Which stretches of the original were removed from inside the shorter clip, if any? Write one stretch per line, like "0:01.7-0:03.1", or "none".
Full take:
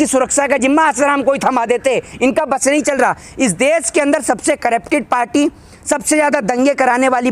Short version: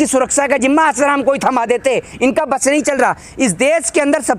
none